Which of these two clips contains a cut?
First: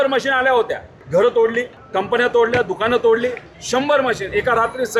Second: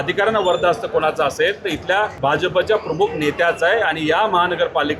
second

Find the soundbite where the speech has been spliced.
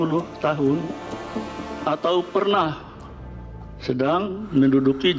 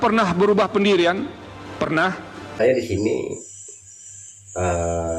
second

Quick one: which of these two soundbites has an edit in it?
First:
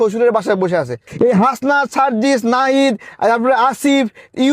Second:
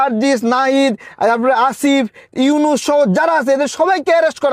first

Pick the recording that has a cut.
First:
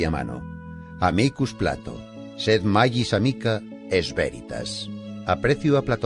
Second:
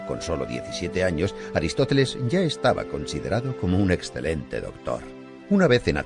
second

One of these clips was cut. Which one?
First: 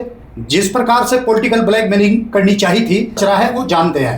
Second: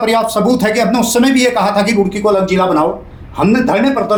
first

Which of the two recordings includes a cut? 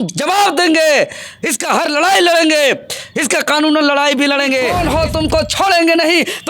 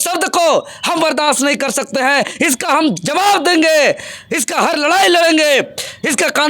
first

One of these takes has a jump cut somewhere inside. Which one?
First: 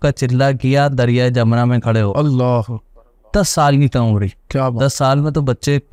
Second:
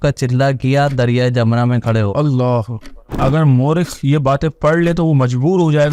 second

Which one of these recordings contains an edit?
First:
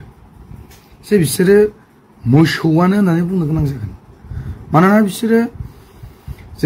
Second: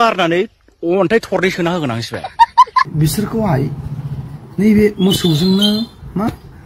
second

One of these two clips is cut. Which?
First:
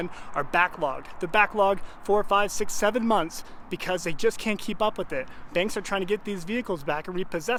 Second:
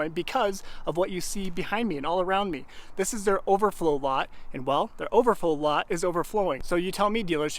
second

